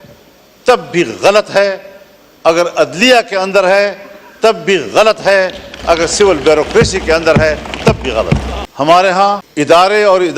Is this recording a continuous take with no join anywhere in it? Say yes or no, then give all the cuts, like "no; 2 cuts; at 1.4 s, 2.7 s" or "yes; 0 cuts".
no; 2 cuts; at 8.6 s, 9.5 s